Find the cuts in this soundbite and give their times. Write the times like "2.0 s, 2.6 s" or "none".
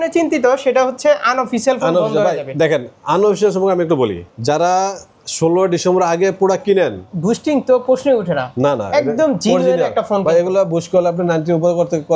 4.3 s, 7.1 s